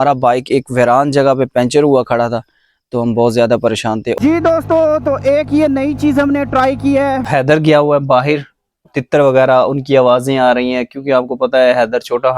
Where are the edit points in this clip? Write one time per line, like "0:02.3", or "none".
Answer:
0:04.2
0:07.3
0:08.9

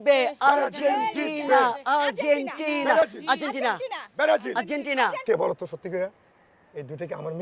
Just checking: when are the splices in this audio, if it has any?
0:05.2

